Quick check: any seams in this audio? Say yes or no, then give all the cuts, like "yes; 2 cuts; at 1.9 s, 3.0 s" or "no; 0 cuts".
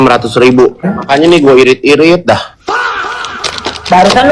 yes; 1 cut; at 0.9 s